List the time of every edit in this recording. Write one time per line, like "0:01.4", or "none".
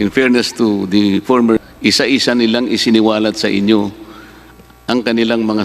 0:01.6